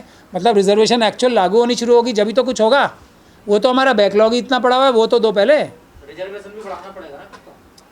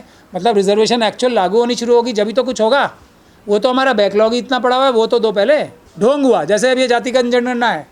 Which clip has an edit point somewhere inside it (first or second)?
second